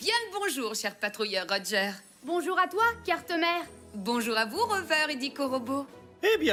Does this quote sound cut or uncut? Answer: uncut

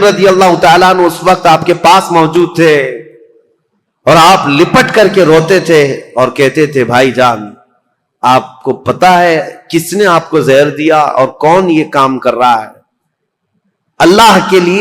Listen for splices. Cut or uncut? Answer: uncut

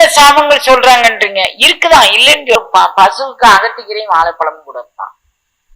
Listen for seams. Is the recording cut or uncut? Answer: cut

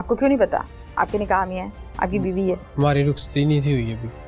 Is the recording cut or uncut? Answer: uncut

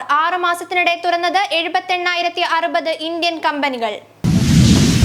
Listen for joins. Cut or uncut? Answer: cut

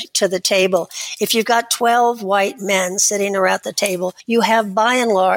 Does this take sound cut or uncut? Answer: cut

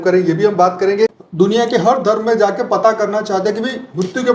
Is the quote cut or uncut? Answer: cut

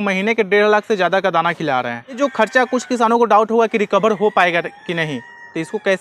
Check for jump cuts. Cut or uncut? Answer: cut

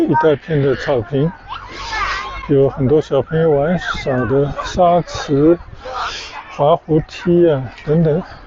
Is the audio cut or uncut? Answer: uncut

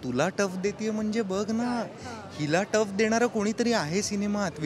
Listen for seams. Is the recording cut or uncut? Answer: uncut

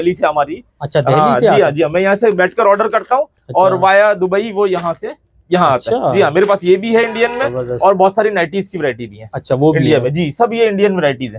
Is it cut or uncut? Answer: uncut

